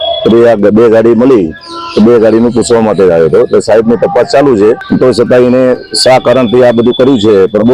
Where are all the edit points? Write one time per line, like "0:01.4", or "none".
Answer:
0:04.8